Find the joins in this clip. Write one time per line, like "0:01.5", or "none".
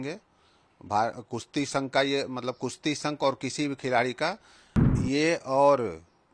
0:04.9